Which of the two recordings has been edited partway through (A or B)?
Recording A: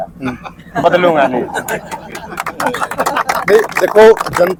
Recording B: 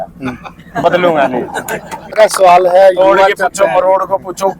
B